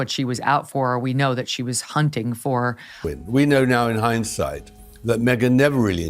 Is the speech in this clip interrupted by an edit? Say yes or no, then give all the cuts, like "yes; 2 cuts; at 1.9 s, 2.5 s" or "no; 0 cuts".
yes; 1 cut; at 2.9 s